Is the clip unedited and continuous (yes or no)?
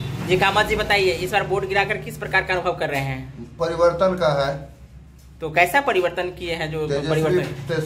yes